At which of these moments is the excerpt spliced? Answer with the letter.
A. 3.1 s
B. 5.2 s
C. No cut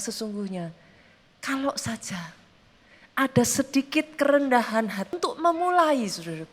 B